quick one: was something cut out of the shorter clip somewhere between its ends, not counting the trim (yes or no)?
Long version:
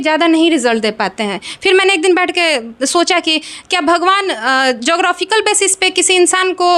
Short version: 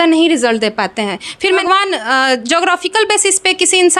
yes